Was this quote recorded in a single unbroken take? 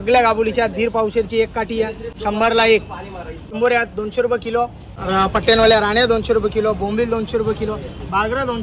no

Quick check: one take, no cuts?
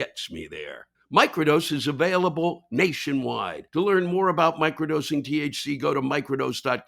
no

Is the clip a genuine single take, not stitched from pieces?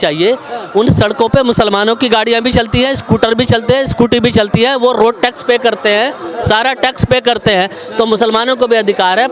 yes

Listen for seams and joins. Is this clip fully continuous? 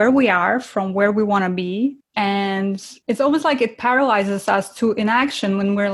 no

